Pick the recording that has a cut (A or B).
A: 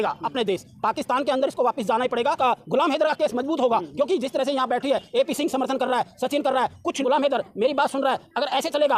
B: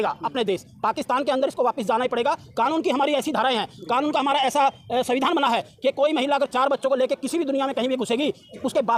A